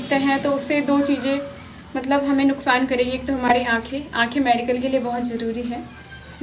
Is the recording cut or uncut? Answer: uncut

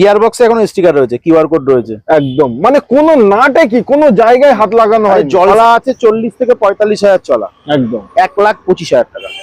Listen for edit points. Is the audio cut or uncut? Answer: cut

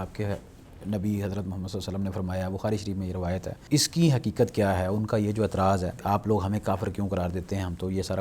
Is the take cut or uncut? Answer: cut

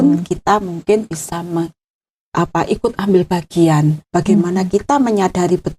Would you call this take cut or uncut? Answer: cut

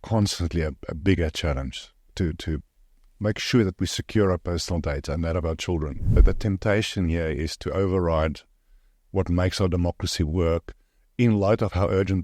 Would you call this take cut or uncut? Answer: cut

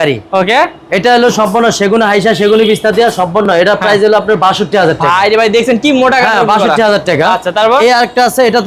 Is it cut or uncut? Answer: uncut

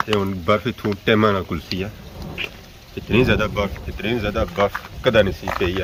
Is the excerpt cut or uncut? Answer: uncut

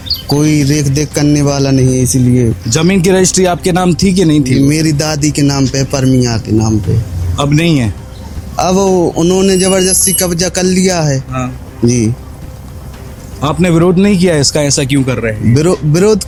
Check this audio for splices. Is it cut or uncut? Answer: uncut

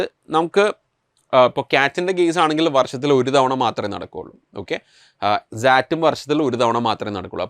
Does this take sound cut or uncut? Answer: uncut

